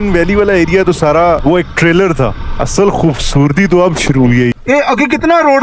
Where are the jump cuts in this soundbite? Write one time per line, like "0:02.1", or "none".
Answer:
0:01.4
0:02.5
0:04.5